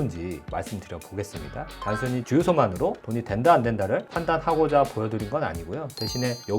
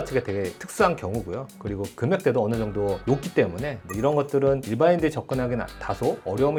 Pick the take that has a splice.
first; 1 cut; at 1.7 s

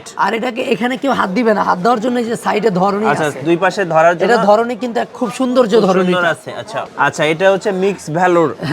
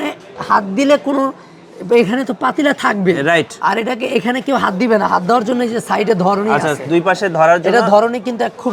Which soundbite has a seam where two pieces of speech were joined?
first; 1 cut; at 6.8 s

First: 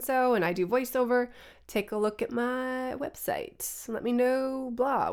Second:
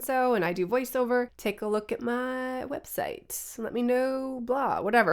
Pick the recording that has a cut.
second; 1 cut; at 1.3 s

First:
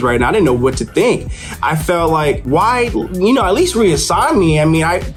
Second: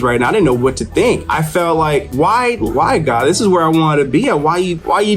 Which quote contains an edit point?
second; 2 cuts; at 1.3 s, 2.7 s

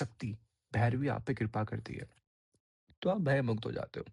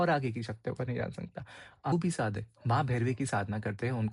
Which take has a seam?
second; 1 cut; at 1.9 s

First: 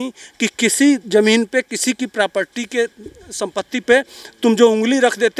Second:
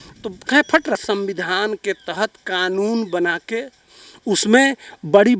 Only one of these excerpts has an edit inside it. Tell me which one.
second; 1 cut; at 1.0 s

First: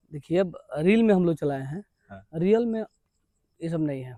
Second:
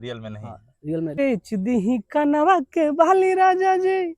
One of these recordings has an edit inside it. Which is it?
second; 1 cut; at 1.2 s

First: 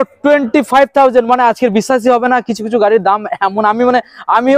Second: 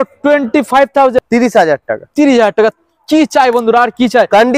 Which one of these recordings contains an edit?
second; 1 cut; at 1.2 s

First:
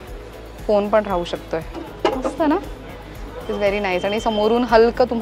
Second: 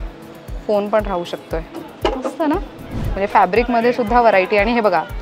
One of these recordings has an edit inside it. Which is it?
second; 1 cut; at 3.0 s

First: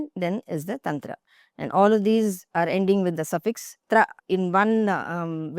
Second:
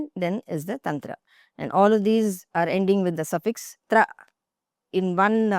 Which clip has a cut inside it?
first; 1 cut; at 4.2 s

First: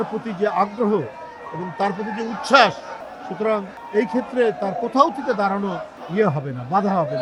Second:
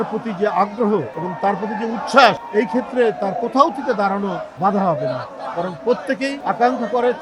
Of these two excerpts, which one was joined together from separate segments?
second; 4 cuts; at 1.2 s, 2.4 s, 4.5 s, 6.4 s

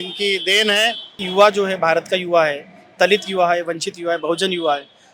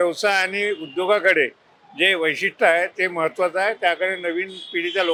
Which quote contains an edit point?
first; 1 cut; at 1.2 s

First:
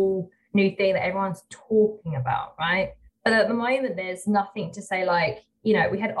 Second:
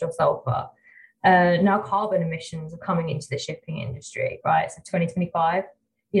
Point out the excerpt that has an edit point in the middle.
first; 1 cut; at 3.0 s

